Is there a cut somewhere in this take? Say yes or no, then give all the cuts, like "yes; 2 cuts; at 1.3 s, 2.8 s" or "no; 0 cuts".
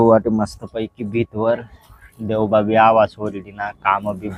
no; 0 cuts